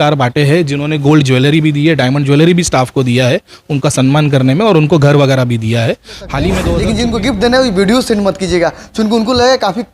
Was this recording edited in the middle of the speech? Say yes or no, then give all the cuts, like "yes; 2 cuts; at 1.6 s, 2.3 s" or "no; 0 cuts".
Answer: yes; 1 cut; at 6.7 s